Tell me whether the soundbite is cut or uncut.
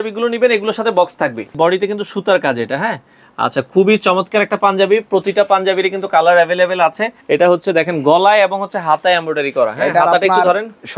cut